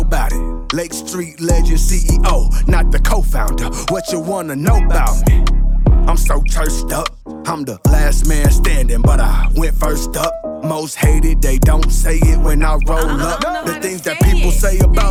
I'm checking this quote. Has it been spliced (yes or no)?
no